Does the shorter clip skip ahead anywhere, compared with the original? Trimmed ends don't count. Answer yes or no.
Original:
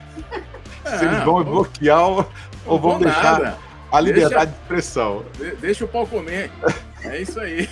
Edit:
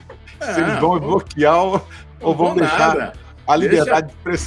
no